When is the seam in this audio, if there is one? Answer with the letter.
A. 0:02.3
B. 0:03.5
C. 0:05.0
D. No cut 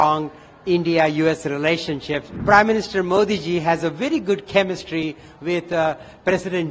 A